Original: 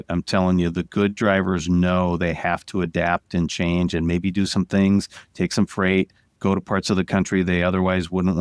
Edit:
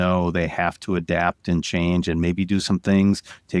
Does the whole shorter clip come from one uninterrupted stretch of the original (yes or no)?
yes